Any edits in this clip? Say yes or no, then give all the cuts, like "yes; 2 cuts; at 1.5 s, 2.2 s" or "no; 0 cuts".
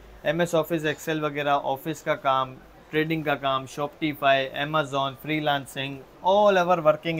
no; 0 cuts